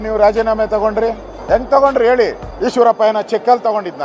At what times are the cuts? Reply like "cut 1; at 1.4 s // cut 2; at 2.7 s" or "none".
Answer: cut 1; at 1.3 s // cut 2; at 2.5 s